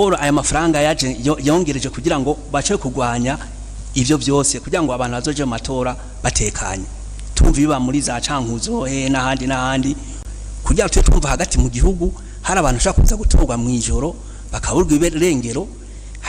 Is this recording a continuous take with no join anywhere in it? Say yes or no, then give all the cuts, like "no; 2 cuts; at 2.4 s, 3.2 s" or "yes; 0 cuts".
no; 1 cut; at 10.1 s